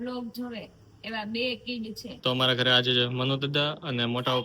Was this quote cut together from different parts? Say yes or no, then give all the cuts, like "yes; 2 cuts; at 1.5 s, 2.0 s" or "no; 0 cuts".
yes; 1 cut; at 2.1 s